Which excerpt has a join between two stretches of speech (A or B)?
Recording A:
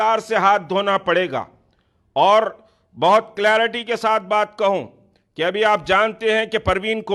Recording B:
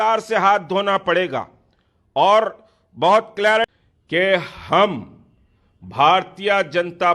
B